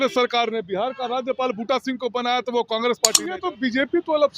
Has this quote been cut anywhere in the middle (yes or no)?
yes